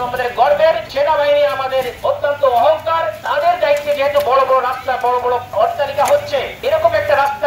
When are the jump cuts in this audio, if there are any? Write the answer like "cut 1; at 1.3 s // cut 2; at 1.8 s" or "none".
cut 1; at 0.9 s // cut 2; at 1.9 s // cut 3; at 3.2 s // cut 4; at 5.5 s // cut 5; at 6.5 s